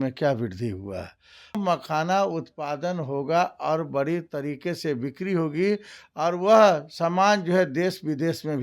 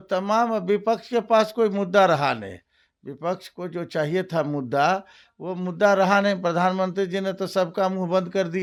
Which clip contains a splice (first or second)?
first